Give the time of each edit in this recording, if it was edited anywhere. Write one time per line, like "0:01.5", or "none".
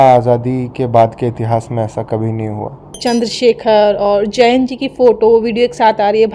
0:03.0